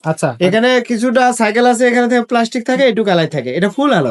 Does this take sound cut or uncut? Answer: uncut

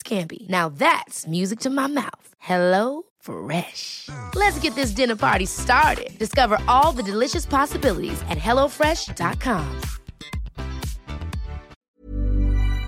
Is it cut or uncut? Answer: cut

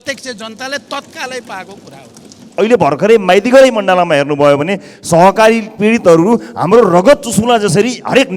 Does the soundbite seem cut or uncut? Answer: cut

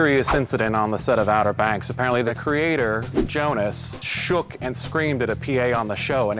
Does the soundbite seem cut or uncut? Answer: cut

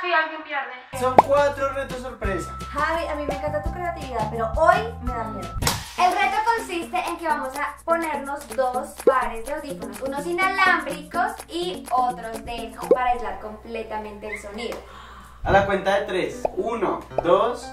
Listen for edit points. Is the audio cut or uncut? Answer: cut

